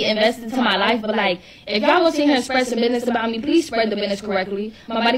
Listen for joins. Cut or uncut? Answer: uncut